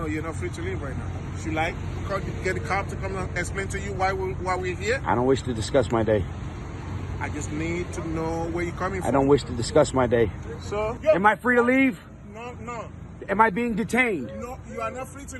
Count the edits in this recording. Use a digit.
1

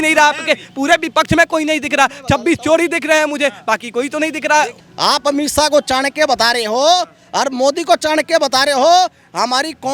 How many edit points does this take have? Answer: 1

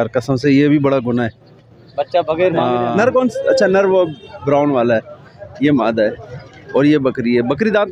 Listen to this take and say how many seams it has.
1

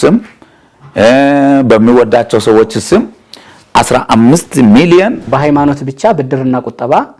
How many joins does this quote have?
1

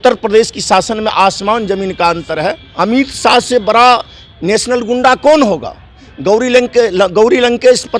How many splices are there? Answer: 1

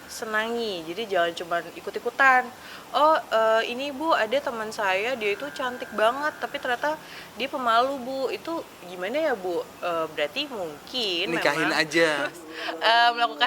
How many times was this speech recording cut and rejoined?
1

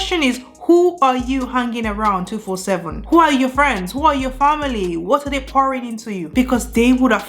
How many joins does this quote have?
1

